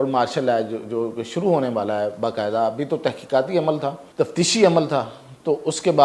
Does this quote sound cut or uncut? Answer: cut